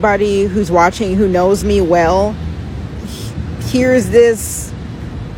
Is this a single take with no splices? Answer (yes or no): yes